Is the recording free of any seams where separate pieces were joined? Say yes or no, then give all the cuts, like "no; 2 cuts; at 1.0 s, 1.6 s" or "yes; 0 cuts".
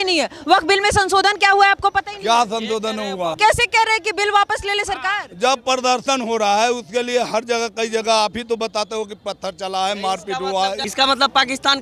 no; 2 cuts; at 3.4 s, 10.8 s